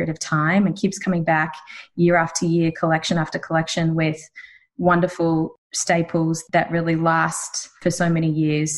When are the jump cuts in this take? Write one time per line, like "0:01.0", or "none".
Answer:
0:05.5
0:06.4
0:07.7